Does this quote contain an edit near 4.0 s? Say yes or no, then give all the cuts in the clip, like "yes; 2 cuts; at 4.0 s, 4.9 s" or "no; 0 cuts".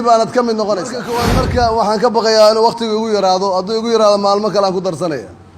no; 1 cut; at 1.3 s